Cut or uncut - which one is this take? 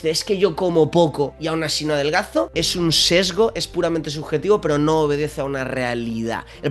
cut